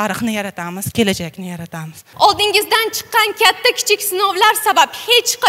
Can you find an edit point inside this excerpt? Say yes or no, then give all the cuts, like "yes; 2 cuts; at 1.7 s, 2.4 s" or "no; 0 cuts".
yes; 1 cut; at 2.0 s